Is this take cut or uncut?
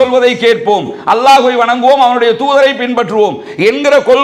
uncut